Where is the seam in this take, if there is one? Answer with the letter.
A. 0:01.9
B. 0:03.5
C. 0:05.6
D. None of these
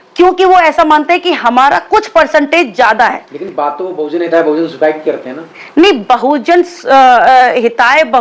D